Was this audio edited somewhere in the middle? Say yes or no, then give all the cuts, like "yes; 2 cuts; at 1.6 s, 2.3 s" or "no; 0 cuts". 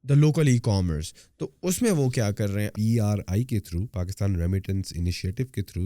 yes; 1 cut; at 2.7 s